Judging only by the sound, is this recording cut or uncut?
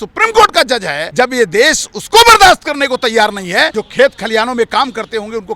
cut